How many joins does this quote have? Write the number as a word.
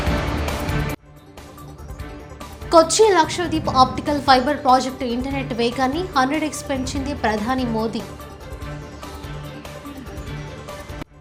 zero